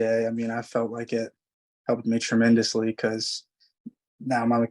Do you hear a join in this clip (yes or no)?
no